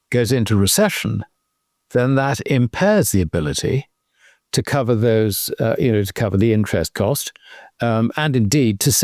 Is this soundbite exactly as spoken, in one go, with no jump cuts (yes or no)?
yes